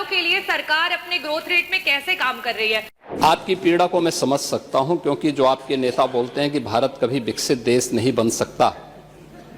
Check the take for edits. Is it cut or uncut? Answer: cut